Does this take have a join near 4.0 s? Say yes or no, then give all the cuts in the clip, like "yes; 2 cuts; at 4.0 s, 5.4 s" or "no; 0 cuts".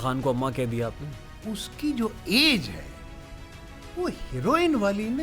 no; 1 cut; at 1.3 s